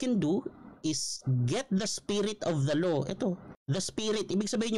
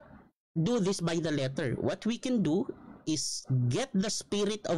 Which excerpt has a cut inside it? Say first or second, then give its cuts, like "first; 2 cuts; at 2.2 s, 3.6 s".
first; 1 cut; at 3.5 s